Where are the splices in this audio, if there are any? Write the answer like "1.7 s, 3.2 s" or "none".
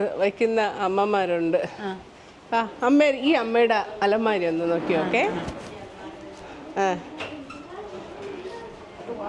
none